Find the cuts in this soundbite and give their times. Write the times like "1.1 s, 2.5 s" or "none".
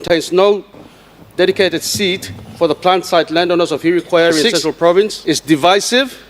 5.2 s